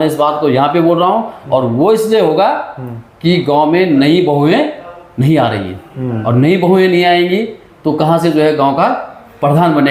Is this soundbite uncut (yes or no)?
yes